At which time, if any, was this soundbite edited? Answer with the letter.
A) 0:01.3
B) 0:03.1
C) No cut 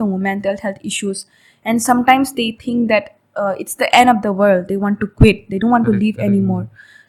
C